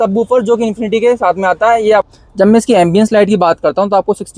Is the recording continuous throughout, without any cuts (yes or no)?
no